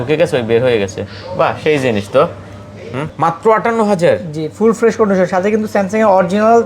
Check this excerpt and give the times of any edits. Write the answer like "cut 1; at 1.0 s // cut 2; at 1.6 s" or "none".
cut 1; at 3.1 s